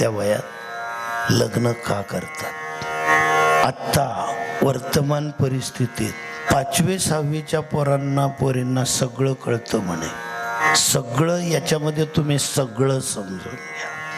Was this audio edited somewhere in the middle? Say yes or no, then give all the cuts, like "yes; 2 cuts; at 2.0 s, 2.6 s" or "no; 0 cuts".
yes; 3 cuts; at 3.1 s, 6.5 s, 10.6 s